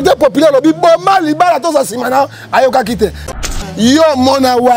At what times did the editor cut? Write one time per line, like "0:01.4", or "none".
0:03.3